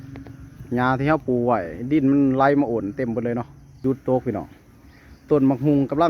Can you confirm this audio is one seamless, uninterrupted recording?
no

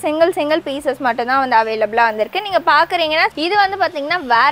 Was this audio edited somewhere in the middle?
yes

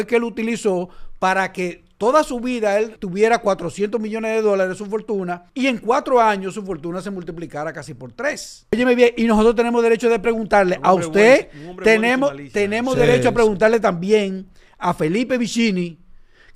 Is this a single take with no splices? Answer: no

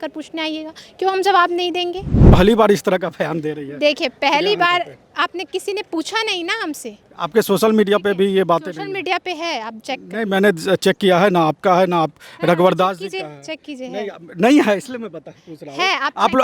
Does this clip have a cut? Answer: yes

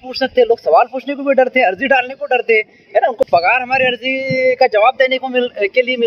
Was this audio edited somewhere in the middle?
no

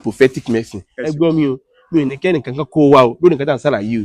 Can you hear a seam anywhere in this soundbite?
yes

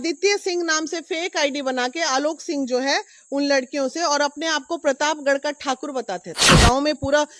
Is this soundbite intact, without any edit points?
no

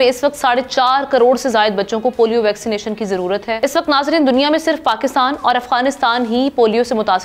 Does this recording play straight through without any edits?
yes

